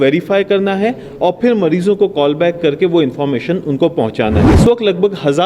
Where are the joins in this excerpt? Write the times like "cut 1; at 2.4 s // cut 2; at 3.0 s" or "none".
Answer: cut 1; at 4.5 s

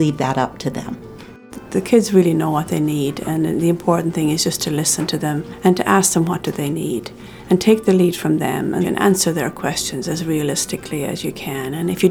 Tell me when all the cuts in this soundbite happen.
cut 1; at 1.5 s // cut 2; at 5.5 s // cut 3; at 8.9 s

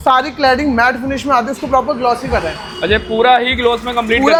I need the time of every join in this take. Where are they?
none

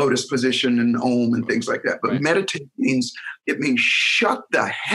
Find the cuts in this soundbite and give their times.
cut 1; at 3.4 s

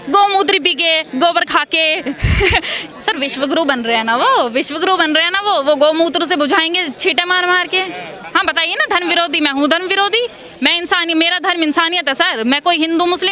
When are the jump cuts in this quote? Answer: cut 1; at 2.8 s // cut 2; at 8.1 s

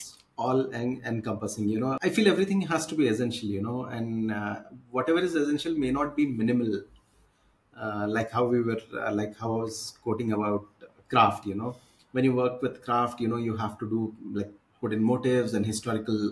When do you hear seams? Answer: cut 1; at 2.0 s

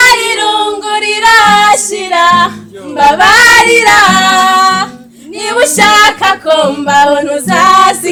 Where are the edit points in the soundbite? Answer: none

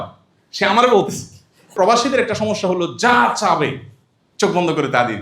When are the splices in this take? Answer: cut 1; at 1.7 s

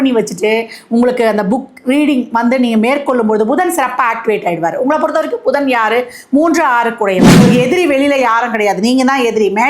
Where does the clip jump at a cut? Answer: cut 1; at 7.3 s

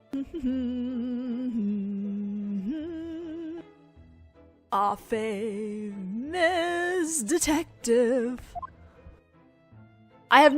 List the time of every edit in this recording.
cut 1; at 3.0 s

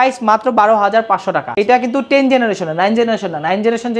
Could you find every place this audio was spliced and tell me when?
cut 1; at 1.4 s

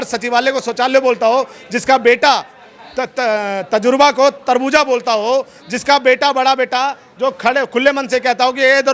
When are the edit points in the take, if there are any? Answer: none

